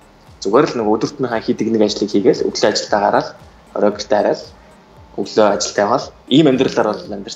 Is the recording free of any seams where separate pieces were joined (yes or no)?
yes